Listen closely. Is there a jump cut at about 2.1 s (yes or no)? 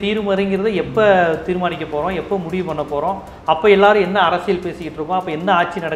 no